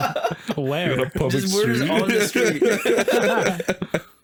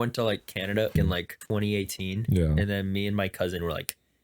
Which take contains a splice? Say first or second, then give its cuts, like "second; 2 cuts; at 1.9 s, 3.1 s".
second; 1 cut; at 1.0 s